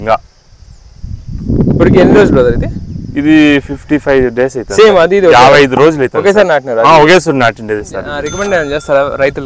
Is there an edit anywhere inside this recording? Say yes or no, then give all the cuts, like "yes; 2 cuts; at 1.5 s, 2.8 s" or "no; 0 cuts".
yes; 1 cut; at 8.3 s